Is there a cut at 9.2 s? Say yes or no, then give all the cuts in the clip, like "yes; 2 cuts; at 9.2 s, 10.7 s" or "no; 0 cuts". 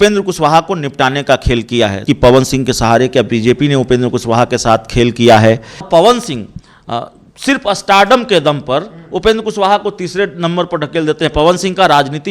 no; 2 cuts; at 2.0 s, 5.8 s